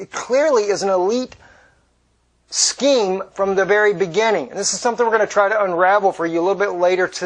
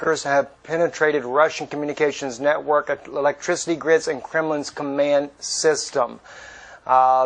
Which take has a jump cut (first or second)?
second